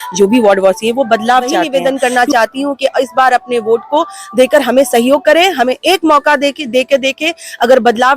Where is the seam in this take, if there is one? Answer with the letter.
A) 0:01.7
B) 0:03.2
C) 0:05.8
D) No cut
A